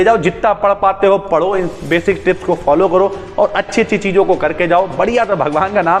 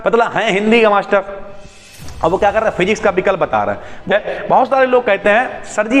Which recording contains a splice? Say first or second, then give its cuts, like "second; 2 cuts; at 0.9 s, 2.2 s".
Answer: second; 1 cut; at 4.1 s